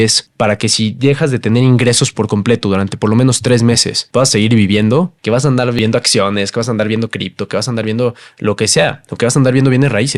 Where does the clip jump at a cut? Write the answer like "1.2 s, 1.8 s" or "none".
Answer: none

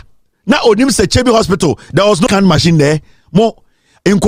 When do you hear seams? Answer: none

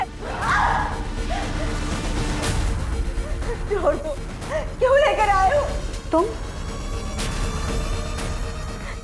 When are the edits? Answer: 5.8 s

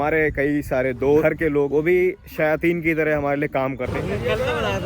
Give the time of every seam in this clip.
1.4 s, 3.9 s

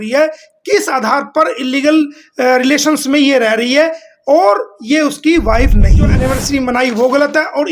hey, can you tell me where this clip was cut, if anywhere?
6.1 s

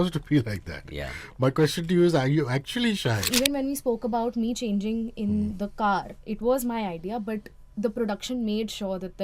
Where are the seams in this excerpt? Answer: 3.3 s

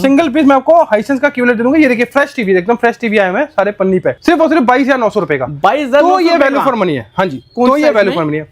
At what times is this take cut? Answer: 4.2 s

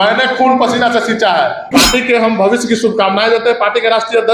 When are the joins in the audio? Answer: 1.6 s

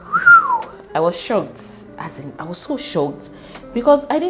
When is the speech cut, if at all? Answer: none

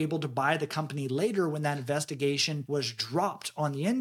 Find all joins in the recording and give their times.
2.6 s

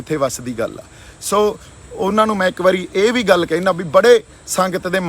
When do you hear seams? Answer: none

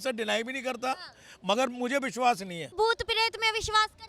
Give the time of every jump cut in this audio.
2.7 s

